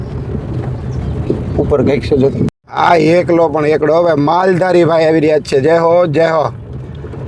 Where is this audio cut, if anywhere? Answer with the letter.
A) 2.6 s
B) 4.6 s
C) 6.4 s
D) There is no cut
A